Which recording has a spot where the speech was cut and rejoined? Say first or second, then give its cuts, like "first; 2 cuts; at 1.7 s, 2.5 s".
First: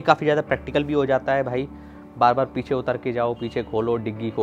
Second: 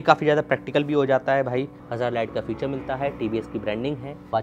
second; 1 cut; at 1.8 s